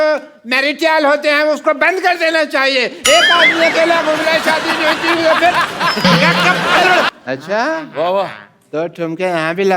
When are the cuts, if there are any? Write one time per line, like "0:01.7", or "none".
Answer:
0:07.1